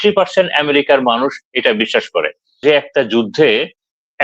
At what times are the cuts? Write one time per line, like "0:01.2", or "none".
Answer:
0:02.6